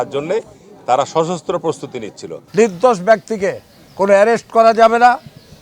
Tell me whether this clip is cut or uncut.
cut